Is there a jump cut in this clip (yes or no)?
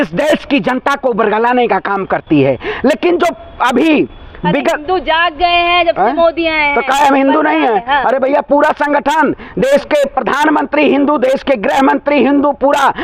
no